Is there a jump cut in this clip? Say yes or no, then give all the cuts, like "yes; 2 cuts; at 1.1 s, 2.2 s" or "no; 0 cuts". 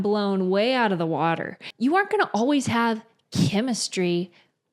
yes; 1 cut; at 1.6 s